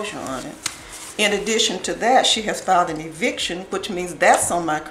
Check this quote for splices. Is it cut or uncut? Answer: uncut